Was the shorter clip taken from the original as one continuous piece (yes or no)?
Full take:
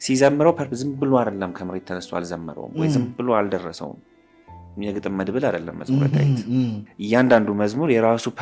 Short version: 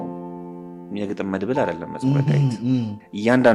yes